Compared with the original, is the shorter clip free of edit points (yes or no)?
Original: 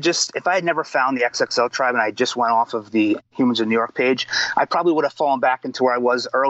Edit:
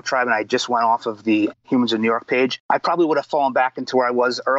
no